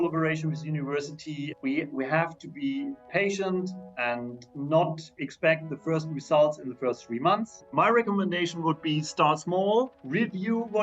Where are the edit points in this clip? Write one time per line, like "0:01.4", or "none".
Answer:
0:03.0
0:07.6

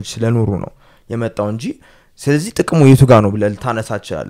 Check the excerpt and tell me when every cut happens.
none

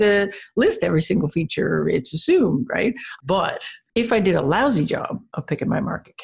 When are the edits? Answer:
0:03.1

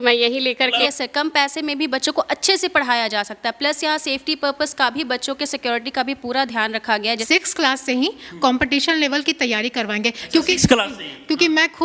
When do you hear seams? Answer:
0:00.8
0:07.1

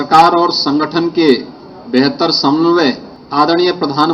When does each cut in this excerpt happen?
0:03.1

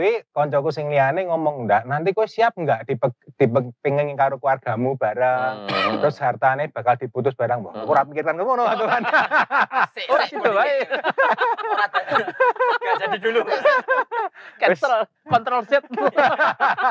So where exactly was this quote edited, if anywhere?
none

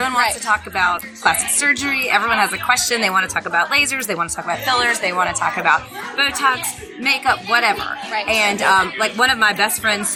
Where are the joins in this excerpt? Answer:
none

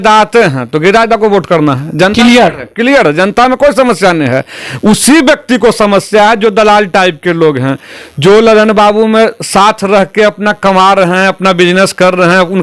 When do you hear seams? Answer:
none

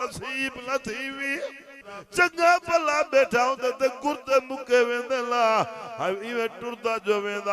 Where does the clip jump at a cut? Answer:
0:02.0

